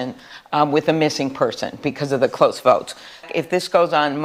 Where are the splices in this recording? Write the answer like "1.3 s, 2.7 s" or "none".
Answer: none